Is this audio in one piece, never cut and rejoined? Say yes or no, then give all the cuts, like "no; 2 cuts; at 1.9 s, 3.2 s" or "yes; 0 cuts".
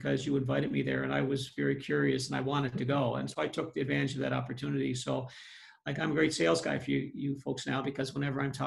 yes; 0 cuts